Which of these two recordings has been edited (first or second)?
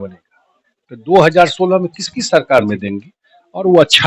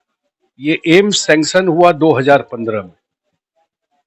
first